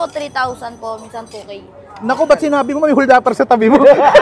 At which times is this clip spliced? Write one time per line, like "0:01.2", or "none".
none